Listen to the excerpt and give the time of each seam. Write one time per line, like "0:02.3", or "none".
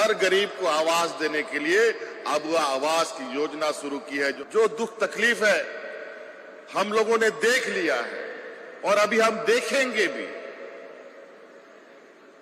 0:04.4